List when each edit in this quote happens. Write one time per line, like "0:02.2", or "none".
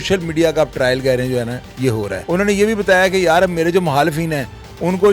0:02.2